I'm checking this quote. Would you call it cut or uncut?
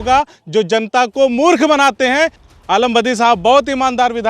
cut